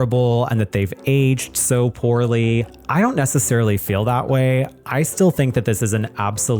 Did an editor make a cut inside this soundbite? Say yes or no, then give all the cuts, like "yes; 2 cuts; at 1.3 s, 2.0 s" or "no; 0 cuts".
yes; 1 cut; at 2.8 s